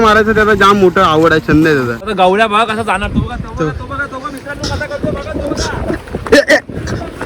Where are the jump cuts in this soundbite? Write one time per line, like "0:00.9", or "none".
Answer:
0:02.1